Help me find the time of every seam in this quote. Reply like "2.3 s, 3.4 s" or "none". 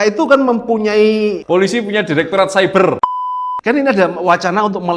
1.4 s, 3.0 s